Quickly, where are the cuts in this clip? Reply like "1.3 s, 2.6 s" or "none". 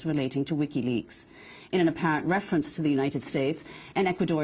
1.1 s